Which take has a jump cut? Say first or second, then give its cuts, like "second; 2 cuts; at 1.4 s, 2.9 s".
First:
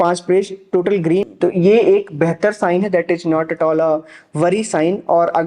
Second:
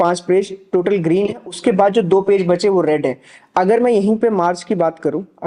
first; 1 cut; at 1.3 s